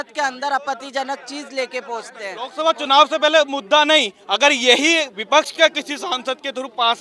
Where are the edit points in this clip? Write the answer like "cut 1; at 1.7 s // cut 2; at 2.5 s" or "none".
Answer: cut 1; at 2.5 s

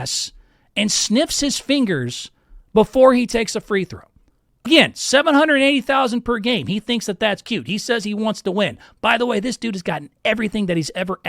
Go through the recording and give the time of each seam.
cut 1; at 4.7 s

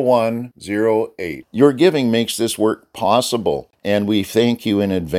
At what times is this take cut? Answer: cut 1; at 3.7 s

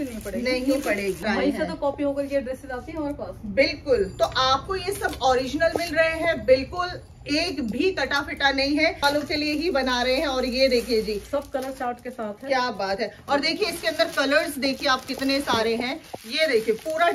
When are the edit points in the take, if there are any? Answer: cut 1; at 1.2 s // cut 2; at 9.0 s

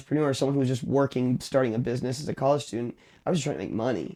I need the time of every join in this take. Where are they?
none

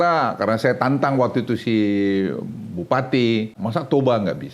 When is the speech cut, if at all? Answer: cut 1; at 3.6 s

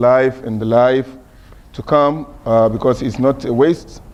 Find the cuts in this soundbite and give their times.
none

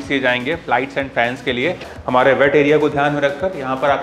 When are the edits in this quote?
cut 1; at 1.9 s

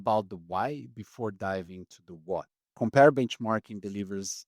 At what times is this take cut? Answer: cut 1; at 2.6 s

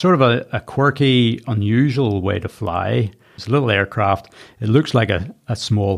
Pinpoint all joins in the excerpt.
cut 1; at 3.4 s

